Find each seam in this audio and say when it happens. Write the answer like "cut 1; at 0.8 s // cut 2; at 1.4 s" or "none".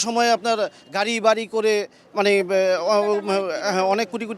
none